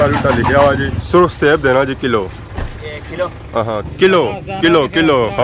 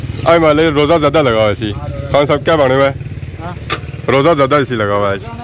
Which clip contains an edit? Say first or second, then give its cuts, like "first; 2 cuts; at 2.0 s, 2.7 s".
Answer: first; 2 cuts; at 0.9 s, 3.8 s